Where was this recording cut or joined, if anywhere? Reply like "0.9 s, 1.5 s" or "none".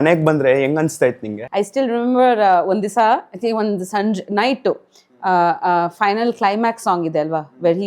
1.3 s